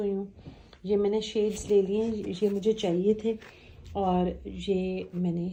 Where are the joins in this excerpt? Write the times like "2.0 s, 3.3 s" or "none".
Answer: none